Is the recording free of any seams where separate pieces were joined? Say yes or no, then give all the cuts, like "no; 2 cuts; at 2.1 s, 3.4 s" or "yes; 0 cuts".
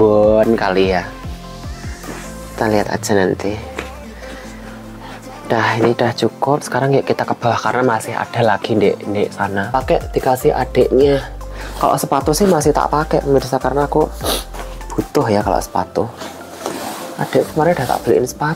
no; 1 cut; at 9.7 s